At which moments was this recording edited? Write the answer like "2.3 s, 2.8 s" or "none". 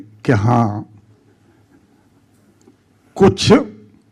none